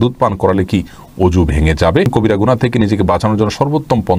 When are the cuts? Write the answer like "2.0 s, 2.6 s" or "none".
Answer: 2.1 s